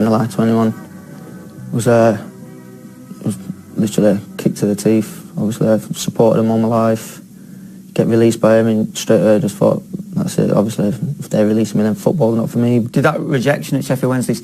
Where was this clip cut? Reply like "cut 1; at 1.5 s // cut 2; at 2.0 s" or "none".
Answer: cut 1; at 10.0 s

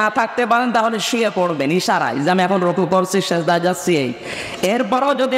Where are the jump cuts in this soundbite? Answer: none

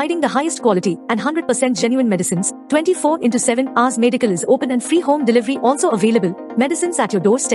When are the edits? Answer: none

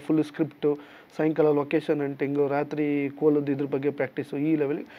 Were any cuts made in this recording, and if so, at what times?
none

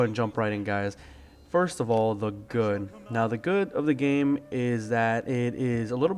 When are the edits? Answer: cut 1; at 3.7 s

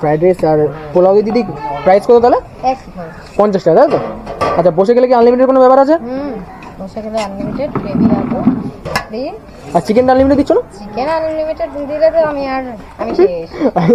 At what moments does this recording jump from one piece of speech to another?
none

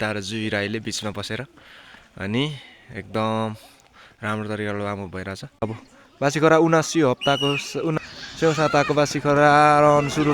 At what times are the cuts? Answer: cut 1; at 5.5 s // cut 2; at 7.9 s

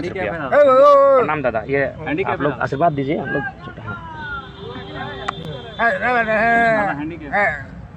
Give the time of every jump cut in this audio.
none

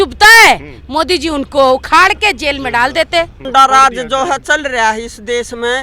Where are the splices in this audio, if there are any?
cut 1; at 3.5 s

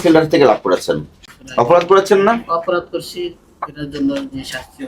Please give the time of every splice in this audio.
none

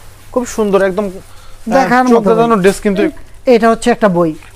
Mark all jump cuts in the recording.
cut 1; at 3.1 s

